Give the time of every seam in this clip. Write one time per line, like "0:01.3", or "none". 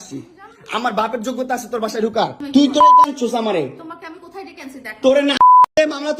0:02.4